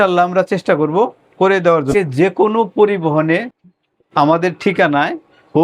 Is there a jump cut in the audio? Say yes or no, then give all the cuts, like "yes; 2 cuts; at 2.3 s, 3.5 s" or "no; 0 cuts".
yes; 1 cut; at 1.9 s